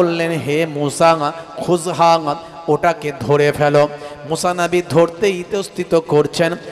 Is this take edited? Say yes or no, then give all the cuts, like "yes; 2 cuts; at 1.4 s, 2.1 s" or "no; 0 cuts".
no; 0 cuts